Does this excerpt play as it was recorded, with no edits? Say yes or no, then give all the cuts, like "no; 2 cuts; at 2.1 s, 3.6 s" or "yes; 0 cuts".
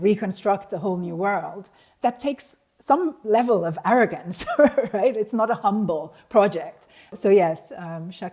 no; 2 cuts; at 1.8 s, 7.1 s